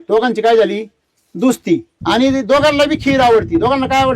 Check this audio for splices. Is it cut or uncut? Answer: cut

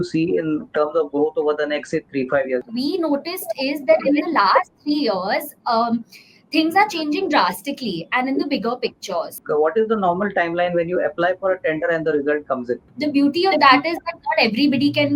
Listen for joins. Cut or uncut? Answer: cut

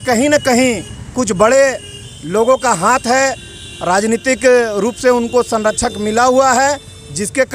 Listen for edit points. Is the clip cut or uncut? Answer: uncut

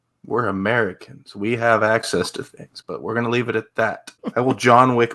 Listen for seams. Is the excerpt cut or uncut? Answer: cut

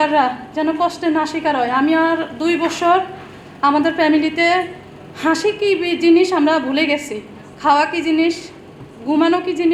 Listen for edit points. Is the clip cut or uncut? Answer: uncut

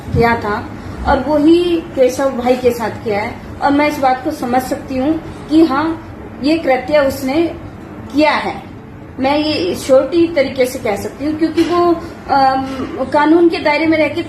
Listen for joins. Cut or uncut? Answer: uncut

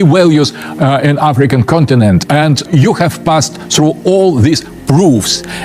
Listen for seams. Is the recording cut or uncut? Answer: cut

